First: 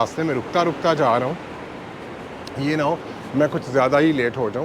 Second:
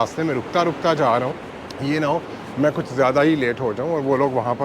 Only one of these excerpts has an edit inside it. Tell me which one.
second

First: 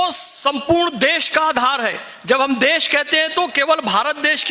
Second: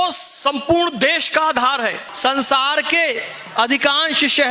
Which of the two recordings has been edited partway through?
second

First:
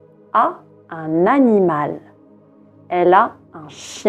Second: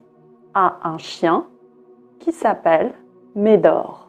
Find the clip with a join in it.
first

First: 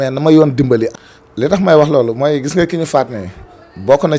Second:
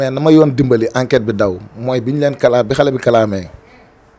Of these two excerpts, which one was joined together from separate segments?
first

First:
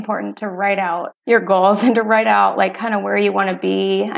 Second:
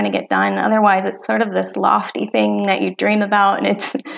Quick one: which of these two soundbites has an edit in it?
first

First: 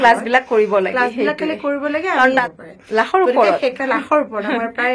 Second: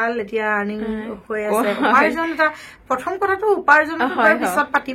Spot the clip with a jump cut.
first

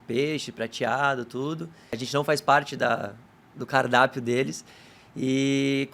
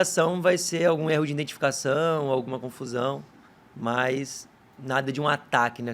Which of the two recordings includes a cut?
first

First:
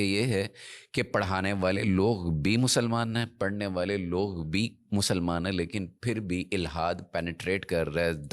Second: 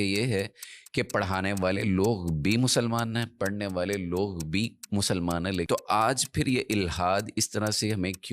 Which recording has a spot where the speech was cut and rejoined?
second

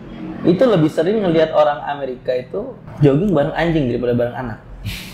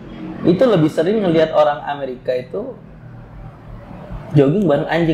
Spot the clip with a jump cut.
first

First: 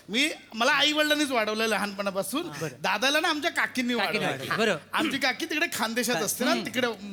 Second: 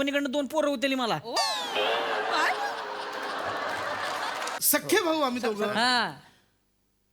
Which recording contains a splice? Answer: second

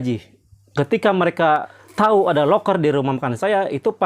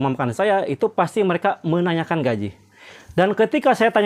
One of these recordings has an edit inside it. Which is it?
first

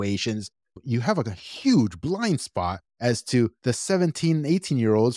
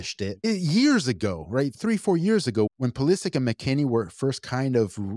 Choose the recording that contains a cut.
first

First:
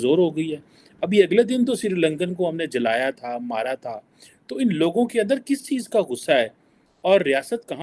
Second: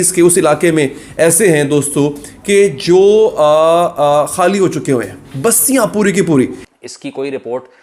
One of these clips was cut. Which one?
second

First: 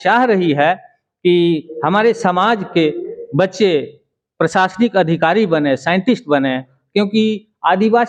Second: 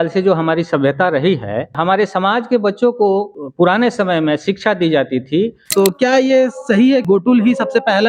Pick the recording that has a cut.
second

